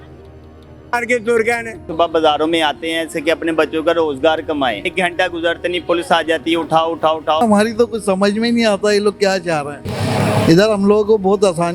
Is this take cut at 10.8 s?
no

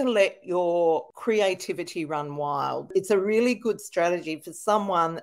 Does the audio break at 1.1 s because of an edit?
yes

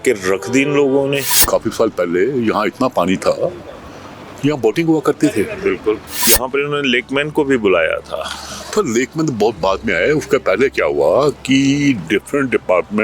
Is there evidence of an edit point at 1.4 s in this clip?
yes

